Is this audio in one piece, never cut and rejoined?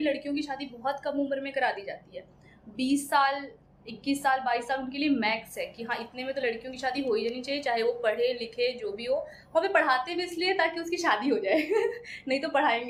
yes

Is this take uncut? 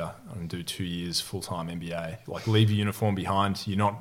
no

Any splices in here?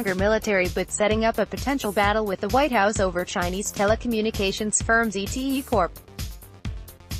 yes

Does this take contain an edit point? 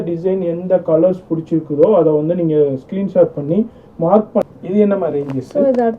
yes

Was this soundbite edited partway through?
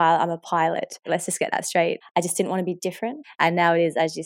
yes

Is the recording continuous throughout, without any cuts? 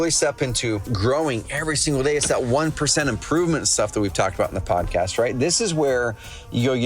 no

